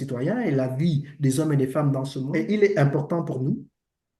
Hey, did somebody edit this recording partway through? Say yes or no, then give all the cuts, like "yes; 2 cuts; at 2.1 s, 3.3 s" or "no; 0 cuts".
yes; 1 cut; at 2.2 s